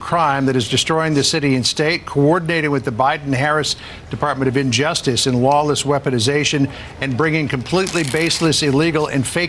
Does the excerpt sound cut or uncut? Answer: uncut